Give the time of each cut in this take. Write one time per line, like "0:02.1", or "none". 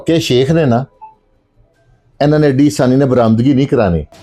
none